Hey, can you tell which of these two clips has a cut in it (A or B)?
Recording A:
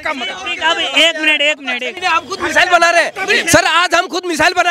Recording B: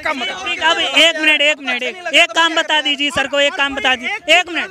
A